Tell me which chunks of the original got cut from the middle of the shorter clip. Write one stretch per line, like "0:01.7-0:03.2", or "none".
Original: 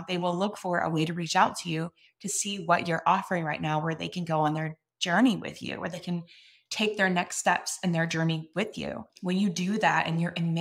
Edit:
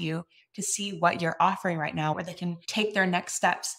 0:03.9-0:06.2